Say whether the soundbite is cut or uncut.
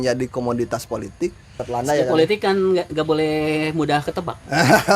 cut